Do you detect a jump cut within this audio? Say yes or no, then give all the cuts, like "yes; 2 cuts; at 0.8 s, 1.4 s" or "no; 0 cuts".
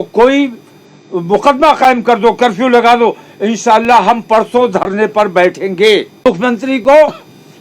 yes; 1 cut; at 6.2 s